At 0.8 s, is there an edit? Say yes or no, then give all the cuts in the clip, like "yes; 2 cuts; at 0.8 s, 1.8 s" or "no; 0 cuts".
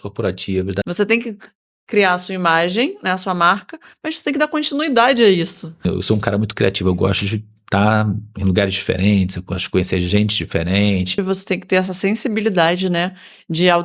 yes; 3 cuts; at 0.8 s, 5.8 s, 11.2 s